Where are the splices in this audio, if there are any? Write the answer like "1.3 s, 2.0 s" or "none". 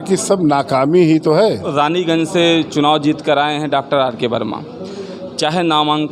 1.7 s